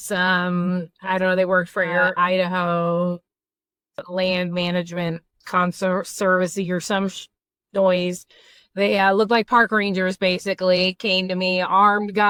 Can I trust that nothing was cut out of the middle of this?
yes; 0 cuts

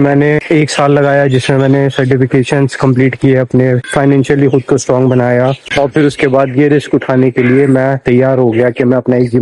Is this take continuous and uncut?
yes; 0 cuts

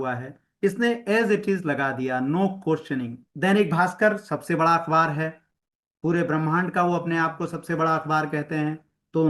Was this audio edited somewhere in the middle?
yes; 1 cut; at 3.2 s

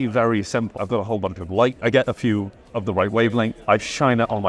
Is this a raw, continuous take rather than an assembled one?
no; 3 cuts; at 0.8 s, 1.8 s, 3.6 s

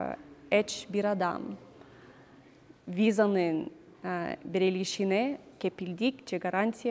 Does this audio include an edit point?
no; 0 cuts

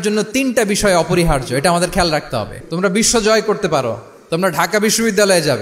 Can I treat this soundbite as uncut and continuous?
no; 1 cut; at 2.6 s

